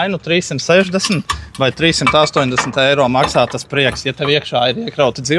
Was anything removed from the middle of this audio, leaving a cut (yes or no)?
no